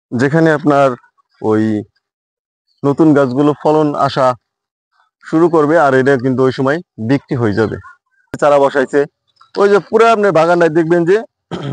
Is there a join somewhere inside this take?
yes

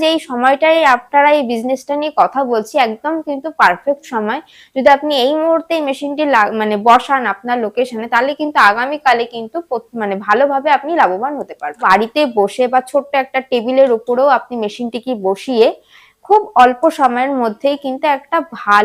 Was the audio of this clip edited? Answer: yes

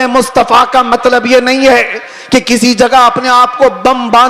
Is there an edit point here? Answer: no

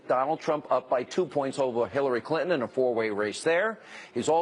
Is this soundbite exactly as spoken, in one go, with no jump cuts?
yes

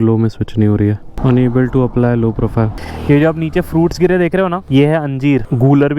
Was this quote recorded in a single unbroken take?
no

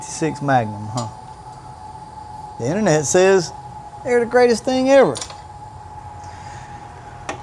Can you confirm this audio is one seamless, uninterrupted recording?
yes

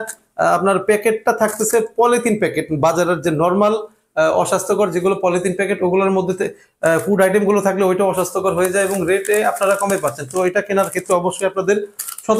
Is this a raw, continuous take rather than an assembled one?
yes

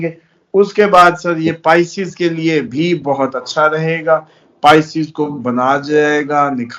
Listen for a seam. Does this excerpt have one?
no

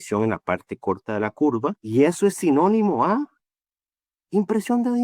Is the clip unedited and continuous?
no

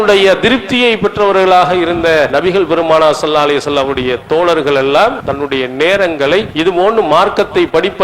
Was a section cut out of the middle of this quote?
yes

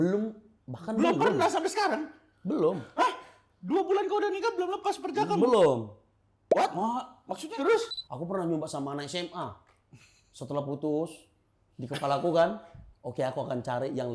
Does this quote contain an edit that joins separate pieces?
yes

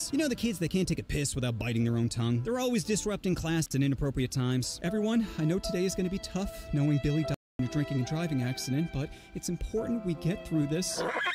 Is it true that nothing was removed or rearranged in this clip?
no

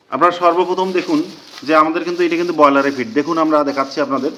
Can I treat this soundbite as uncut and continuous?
yes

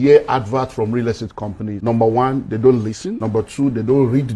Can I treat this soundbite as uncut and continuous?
no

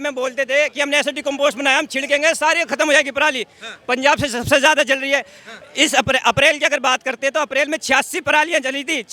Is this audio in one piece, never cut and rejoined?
yes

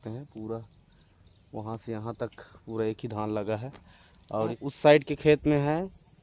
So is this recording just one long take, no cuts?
no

